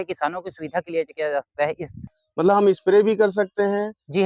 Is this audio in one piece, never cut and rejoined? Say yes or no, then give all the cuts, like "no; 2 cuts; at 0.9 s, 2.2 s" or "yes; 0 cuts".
no; 1 cut; at 1.9 s